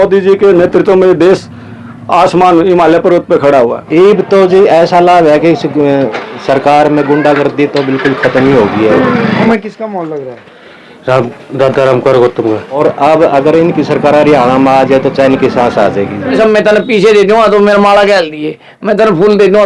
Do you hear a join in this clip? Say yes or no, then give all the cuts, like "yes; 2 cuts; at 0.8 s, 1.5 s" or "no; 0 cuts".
yes; 4 cuts; at 3.8 s, 9.5 s, 12.8 s, 16.4 s